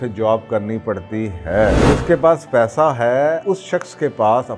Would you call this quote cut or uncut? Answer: cut